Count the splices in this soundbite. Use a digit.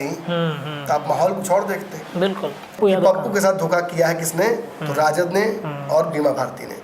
1